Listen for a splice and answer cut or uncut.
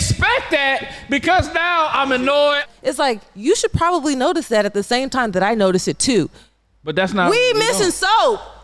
cut